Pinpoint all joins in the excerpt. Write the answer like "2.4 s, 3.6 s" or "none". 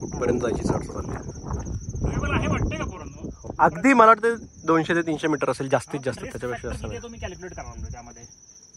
3.4 s